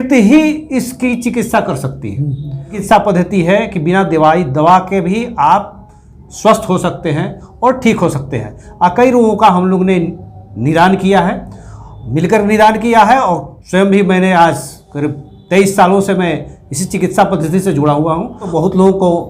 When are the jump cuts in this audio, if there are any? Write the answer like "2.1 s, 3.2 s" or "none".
2.8 s, 18.5 s